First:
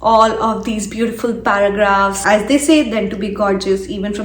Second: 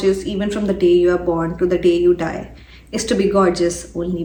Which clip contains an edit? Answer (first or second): first